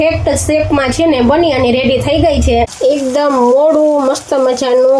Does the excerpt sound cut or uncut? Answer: cut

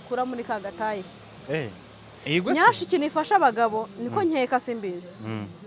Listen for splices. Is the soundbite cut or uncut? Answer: uncut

